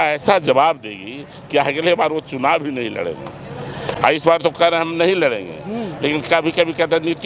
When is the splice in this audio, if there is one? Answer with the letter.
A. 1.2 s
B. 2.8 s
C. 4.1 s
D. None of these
D